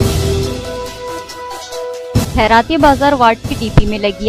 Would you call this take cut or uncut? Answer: cut